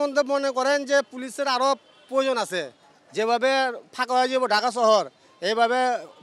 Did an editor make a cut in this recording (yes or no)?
no